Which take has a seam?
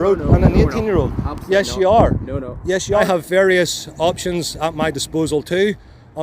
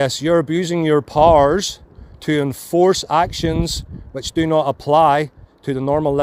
first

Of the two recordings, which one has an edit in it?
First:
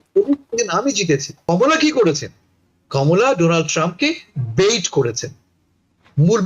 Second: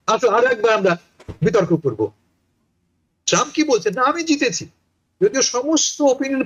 first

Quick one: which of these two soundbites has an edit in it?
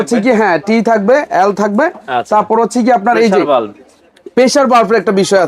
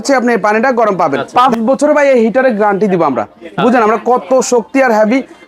second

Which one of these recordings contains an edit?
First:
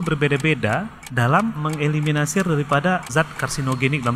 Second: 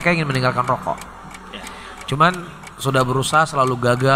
first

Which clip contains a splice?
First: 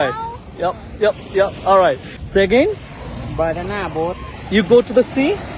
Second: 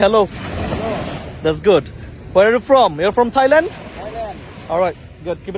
first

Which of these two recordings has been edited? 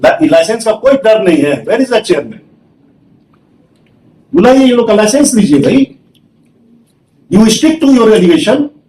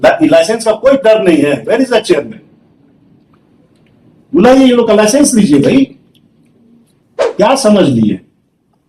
second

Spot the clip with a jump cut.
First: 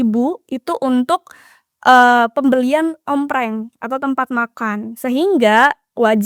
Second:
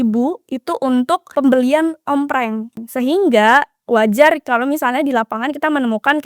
second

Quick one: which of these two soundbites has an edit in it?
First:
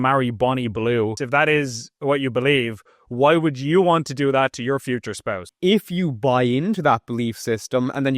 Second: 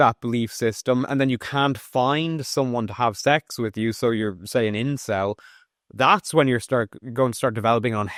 first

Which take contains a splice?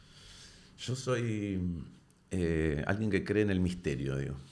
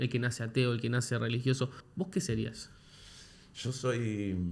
second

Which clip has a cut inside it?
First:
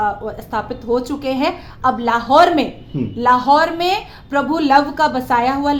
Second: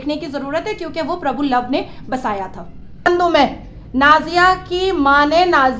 second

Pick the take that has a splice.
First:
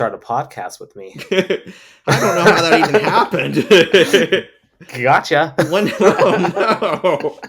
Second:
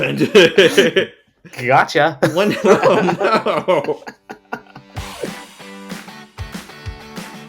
second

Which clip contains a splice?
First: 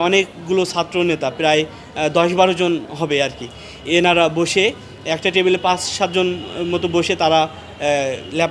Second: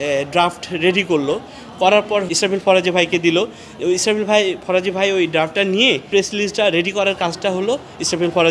second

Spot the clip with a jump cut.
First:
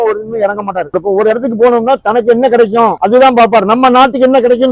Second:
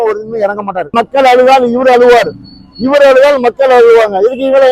second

